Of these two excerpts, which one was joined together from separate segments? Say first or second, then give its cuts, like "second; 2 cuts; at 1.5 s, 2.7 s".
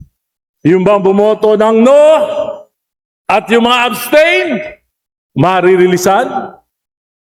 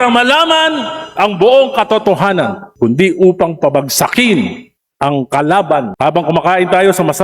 second; 2 cuts; at 2.6 s, 5.9 s